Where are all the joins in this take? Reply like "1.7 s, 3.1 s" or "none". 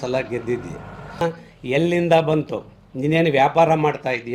1.2 s